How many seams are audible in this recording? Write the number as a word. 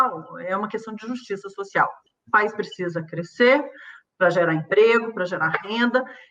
one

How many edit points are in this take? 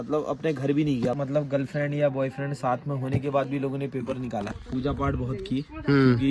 two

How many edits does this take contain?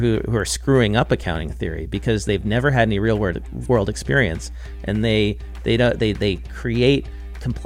zero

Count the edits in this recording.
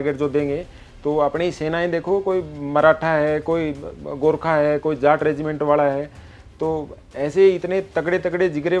zero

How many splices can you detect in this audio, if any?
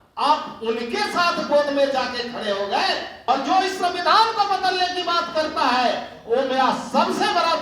one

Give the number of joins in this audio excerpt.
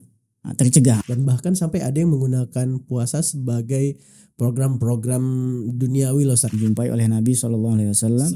two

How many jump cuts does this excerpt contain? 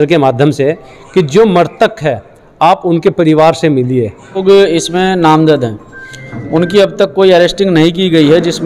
one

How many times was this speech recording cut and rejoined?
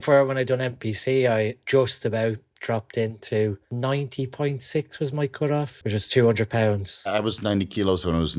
four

